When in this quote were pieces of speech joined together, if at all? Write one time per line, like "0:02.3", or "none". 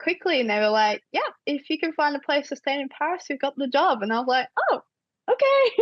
none